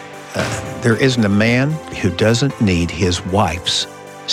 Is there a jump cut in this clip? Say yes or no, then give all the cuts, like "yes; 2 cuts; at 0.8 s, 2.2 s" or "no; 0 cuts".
yes; 1 cut; at 1.8 s